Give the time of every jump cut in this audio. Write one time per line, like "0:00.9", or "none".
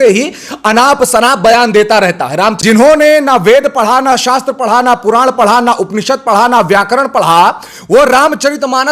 0:02.6